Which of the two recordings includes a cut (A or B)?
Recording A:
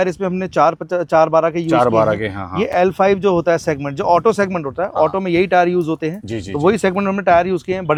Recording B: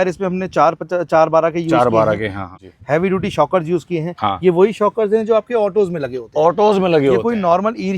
B